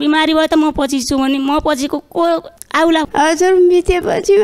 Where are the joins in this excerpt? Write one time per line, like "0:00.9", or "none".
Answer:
0:03.1